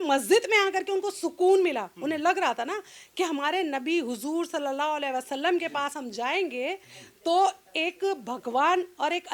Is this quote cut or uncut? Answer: uncut